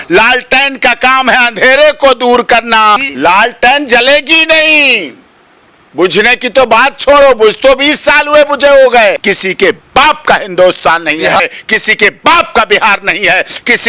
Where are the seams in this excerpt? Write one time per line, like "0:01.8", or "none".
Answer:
0:03.1
0:09.3
0:11.4